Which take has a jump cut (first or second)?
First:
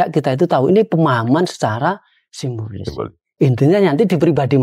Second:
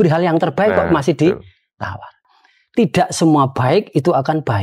second